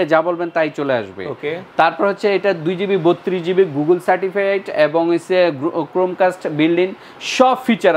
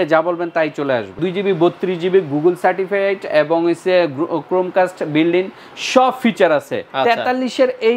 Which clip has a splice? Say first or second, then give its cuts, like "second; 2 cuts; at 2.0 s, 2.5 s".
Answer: second; 2 cuts; at 1.2 s, 6.8 s